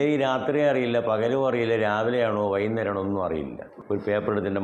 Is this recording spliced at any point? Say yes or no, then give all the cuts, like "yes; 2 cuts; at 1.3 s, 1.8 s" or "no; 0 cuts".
yes; 1 cut; at 3.6 s